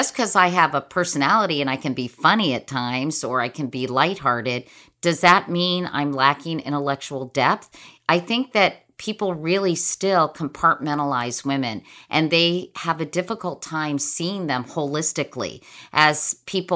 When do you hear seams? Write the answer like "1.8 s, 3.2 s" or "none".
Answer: none